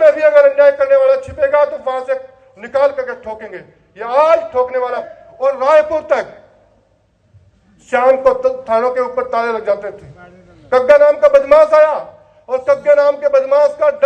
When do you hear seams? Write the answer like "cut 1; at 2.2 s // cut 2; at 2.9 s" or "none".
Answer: cut 1; at 5.1 s